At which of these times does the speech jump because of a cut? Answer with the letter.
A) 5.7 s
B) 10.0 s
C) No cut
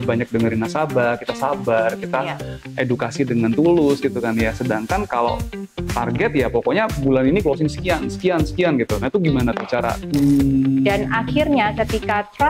B